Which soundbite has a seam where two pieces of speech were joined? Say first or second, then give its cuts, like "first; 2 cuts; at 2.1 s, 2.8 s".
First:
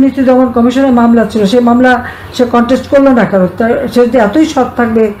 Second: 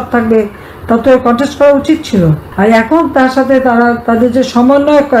second; 1 cut; at 2.4 s